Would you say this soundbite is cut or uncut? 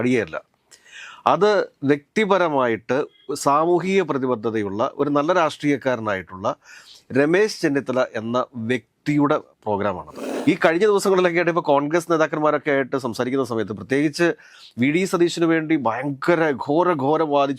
cut